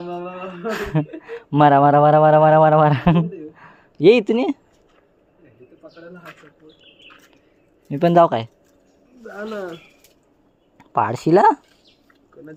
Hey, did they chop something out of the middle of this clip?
no; 0 cuts

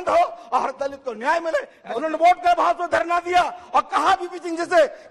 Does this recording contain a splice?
yes; 1 cut; at 1.8 s

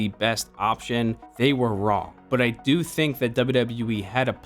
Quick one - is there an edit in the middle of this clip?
yes; 2 cuts; at 1.3 s, 2.1 s

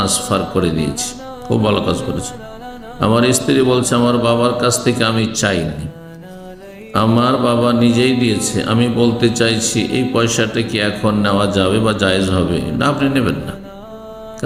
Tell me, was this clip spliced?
no; 0 cuts

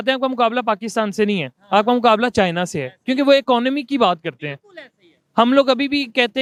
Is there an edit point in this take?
no; 0 cuts

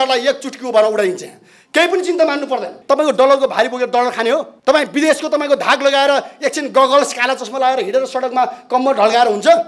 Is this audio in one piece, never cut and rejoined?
no; 2 cuts; at 2.8 s, 4.5 s

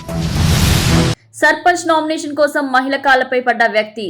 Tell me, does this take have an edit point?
yes; 1 cut; at 1.2 s

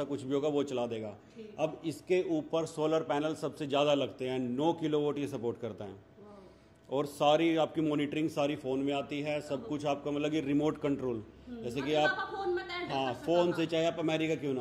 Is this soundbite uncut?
yes; 0 cuts

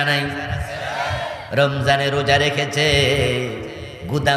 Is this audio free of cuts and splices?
yes; 0 cuts

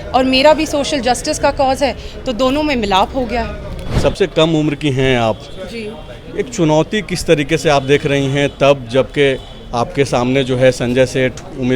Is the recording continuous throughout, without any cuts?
no; 1 cut; at 3.9 s

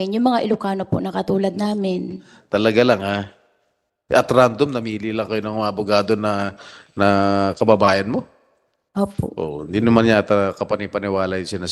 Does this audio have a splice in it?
no; 0 cuts

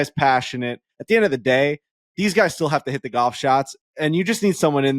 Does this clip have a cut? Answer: yes; 1 cut; at 0.9 s

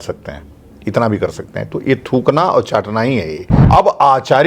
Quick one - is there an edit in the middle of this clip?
yes; 1 cut; at 3.5 s

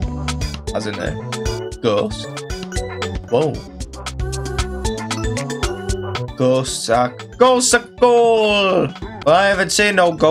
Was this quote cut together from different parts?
yes; 1 cut; at 9.0 s

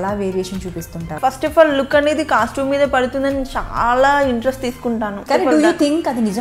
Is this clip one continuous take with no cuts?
no; 2 cuts; at 1.2 s, 5.2 s

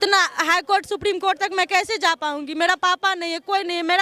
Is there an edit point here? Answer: no; 0 cuts

